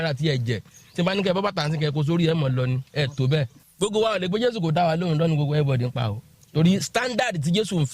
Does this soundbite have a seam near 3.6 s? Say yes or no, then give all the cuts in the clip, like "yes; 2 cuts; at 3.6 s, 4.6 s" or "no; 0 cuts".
yes; 1 cut; at 3.6 s